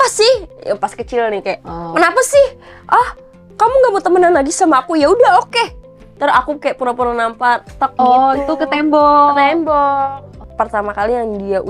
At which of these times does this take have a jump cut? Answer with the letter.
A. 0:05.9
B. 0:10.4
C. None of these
B